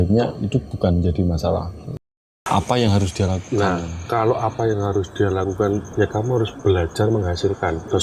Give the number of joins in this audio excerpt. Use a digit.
1